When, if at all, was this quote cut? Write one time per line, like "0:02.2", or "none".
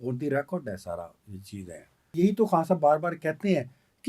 0:02.1